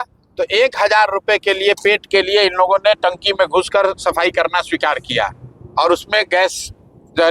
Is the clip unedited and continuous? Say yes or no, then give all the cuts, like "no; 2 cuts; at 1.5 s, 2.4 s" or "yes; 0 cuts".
yes; 0 cuts